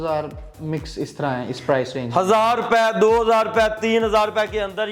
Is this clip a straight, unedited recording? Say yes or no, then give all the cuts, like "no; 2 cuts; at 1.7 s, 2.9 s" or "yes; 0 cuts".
yes; 0 cuts